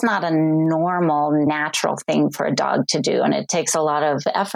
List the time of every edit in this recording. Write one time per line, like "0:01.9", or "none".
0:01.5